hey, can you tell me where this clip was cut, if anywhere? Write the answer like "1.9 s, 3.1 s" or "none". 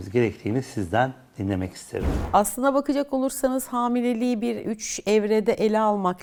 none